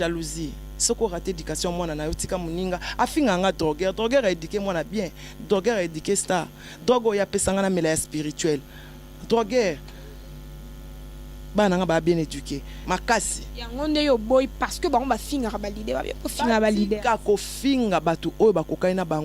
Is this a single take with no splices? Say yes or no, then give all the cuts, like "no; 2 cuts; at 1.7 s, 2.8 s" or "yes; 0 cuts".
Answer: no; 1 cut; at 12.7 s